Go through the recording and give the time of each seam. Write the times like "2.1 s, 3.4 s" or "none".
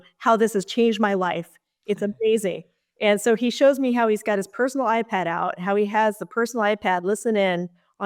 none